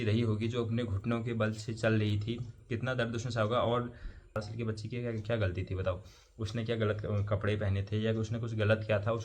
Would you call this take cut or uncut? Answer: cut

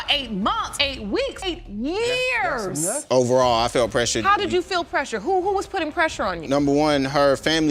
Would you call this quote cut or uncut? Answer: cut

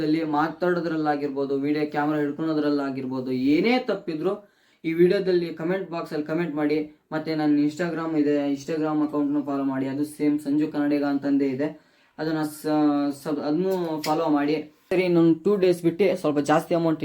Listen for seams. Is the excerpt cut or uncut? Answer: cut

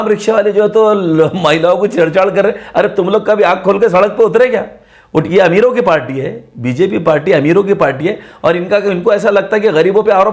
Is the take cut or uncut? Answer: uncut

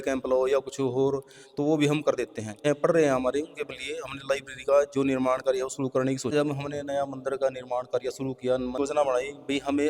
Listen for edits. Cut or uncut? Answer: cut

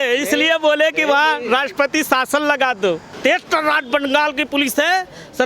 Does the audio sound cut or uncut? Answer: cut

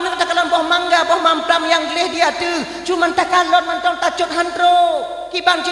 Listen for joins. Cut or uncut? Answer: uncut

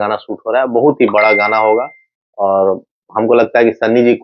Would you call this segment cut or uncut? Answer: uncut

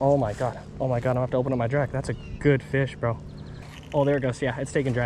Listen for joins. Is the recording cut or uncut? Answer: cut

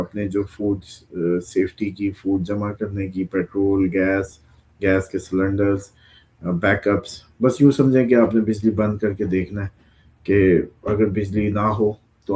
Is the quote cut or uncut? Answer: uncut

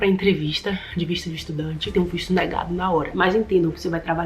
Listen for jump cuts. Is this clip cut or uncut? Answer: cut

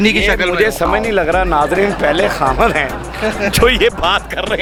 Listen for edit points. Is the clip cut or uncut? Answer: uncut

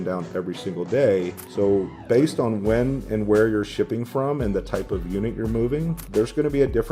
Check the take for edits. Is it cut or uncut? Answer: cut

